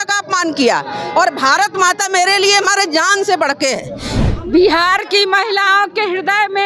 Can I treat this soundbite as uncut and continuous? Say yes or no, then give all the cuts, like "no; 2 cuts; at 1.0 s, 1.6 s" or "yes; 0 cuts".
no; 1 cut; at 4.1 s